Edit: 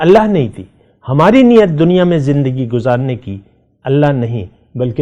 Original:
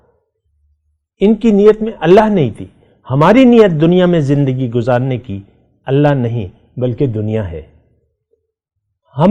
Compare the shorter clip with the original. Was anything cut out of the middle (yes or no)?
no